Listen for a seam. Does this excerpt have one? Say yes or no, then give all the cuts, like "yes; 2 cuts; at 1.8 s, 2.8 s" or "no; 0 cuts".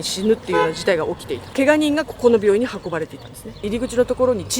yes; 2 cuts; at 1.5 s, 3.6 s